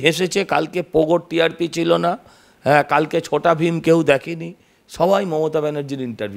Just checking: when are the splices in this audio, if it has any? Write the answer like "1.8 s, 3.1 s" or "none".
none